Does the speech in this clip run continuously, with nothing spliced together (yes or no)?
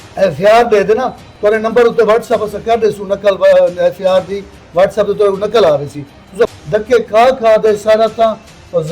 no